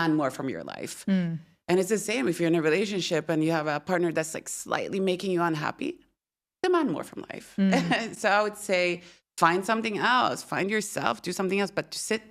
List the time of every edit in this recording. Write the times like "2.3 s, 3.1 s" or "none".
none